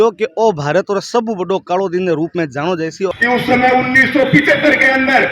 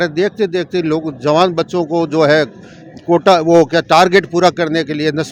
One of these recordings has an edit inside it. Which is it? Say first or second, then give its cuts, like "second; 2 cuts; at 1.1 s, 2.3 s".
first; 1 cut; at 3.1 s